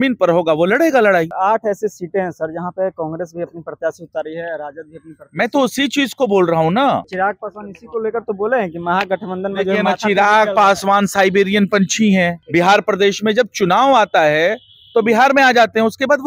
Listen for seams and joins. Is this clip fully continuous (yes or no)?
no